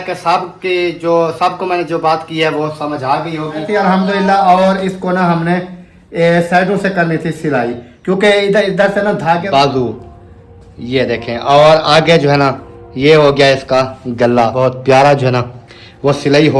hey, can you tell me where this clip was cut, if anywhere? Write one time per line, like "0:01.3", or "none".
0:03.7
0:09.4
0:14.6